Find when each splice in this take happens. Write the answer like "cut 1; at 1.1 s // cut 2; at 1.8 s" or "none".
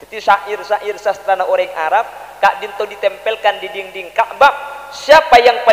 none